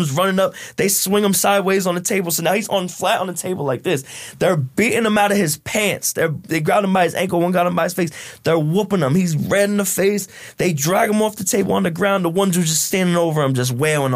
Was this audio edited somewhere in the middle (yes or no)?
no